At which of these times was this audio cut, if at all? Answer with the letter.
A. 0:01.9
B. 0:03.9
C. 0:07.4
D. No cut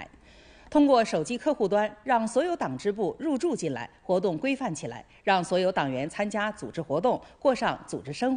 D